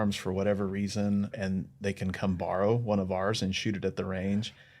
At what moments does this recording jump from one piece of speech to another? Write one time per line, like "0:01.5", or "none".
0:01.3

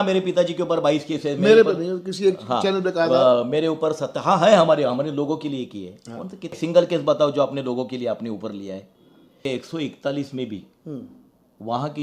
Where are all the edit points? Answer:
0:06.5
0:09.5

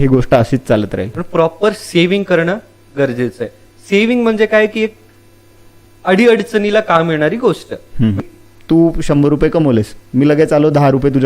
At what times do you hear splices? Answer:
0:01.2
0:08.2

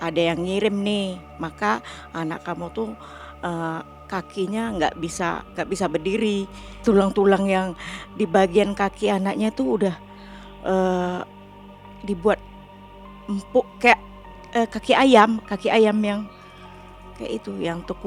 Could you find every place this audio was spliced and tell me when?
none

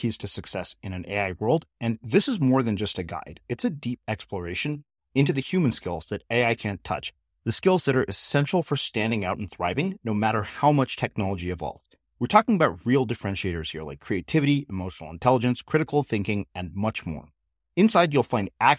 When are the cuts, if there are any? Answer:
none

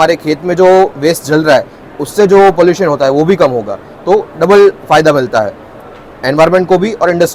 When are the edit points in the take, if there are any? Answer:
none

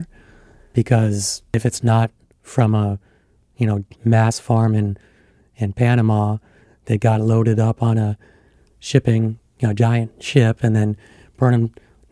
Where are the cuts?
0:01.5

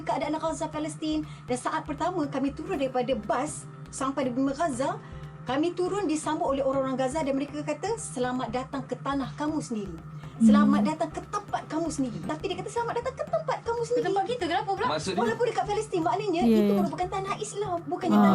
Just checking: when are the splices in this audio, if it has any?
0:12.3

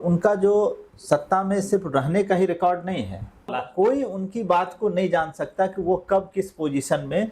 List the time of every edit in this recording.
0:03.6

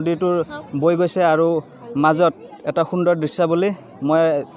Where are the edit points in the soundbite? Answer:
none

